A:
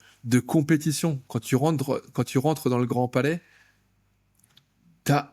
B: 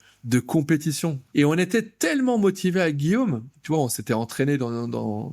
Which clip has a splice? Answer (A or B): B